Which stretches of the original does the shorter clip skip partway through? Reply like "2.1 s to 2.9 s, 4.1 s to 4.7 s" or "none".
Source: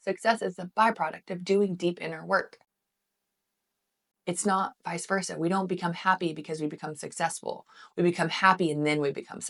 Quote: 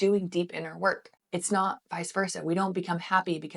2.6 s to 4.1 s